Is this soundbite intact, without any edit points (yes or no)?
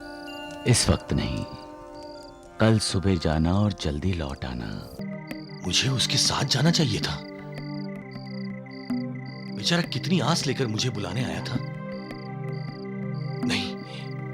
no